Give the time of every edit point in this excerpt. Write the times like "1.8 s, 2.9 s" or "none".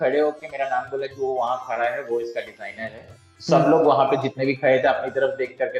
none